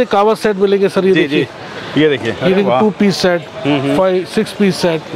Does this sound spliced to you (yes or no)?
no